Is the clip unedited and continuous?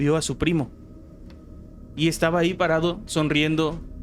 yes; 0 cuts

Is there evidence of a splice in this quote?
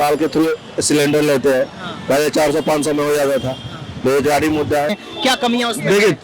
yes; 1 cut; at 5.0 s

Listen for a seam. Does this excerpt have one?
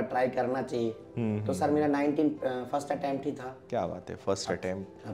no; 0 cuts

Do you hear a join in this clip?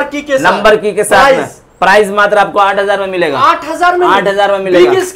no; 0 cuts

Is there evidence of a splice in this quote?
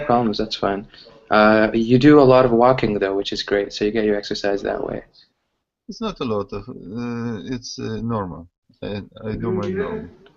yes; 1 cut; at 1.6 s

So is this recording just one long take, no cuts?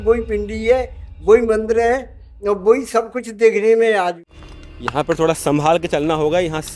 no; 1 cut; at 4.2 s

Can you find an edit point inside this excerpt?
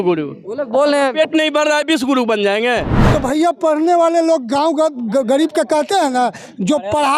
yes; 1 cut; at 3.0 s

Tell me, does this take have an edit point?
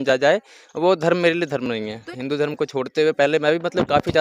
yes; 1 cut; at 2.0 s

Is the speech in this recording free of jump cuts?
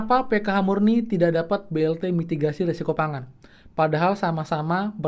yes; 0 cuts

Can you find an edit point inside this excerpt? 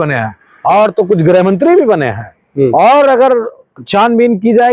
no; 0 cuts

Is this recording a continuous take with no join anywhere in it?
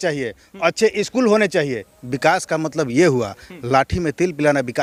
yes; 0 cuts

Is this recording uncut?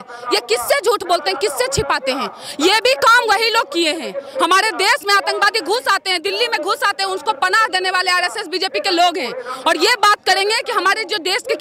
yes; 0 cuts

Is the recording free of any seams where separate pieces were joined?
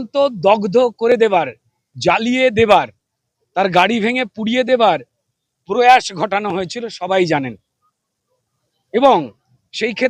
yes; 0 cuts

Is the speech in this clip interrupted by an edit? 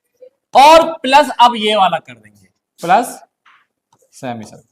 no; 0 cuts

